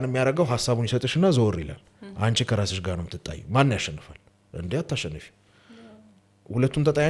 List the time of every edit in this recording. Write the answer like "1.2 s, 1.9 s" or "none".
none